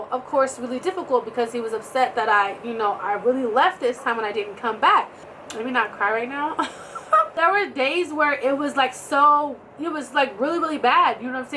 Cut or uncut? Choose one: cut